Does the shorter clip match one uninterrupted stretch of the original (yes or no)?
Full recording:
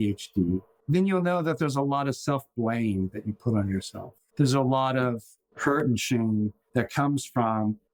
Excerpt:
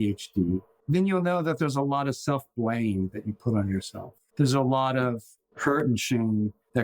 yes